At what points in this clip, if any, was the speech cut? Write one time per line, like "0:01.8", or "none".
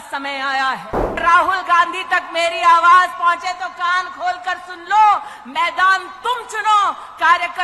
0:01.2